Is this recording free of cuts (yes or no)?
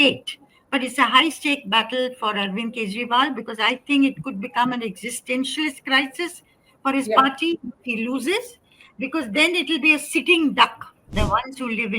no